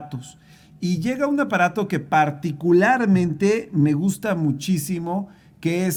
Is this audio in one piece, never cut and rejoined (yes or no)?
yes